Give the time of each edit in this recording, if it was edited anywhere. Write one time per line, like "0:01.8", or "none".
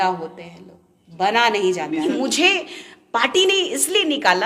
0:02.1